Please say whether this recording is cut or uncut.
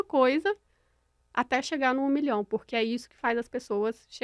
uncut